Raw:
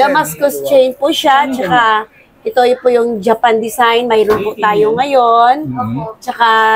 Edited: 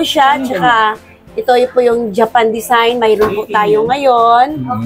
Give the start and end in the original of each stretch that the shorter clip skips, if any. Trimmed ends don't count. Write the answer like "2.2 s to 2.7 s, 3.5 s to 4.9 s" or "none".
none

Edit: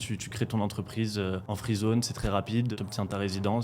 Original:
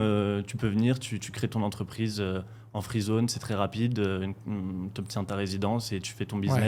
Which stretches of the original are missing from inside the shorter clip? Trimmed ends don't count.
2.5 s to 2.8 s, 4.0 s to 4.9 s

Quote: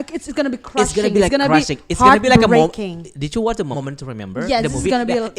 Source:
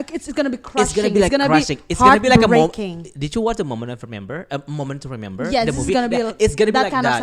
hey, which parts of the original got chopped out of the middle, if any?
3.7 s to 4.8 s

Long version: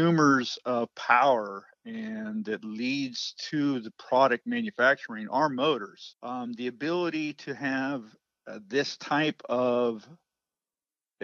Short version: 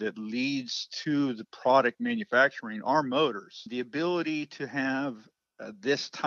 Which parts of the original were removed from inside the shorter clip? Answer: 6.1 s to 6.5 s

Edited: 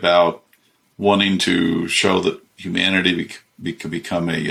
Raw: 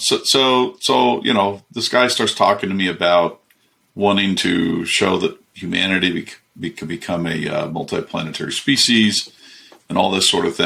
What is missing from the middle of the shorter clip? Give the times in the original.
none

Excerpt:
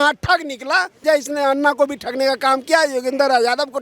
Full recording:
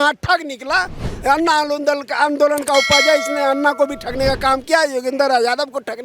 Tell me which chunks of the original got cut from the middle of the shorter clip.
1.0 s to 3.0 s

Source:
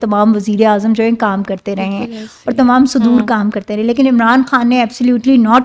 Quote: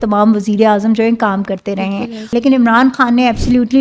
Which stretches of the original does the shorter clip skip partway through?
2.3 s to 3.8 s

